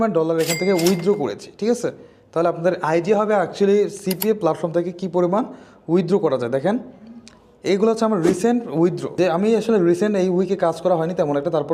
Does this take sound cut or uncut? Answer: cut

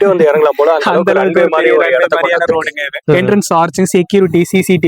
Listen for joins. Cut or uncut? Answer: cut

